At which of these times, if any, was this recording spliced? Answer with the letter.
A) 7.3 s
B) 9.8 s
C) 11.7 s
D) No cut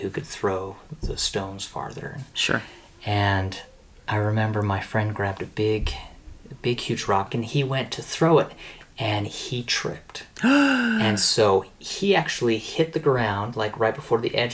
A